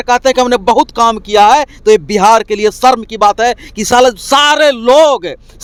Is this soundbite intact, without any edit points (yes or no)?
yes